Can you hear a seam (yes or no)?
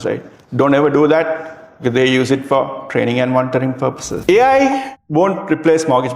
yes